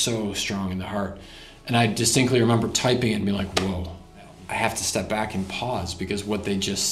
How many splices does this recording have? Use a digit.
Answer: 1